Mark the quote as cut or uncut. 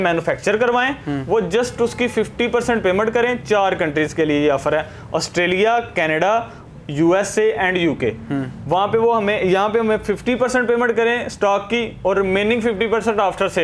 uncut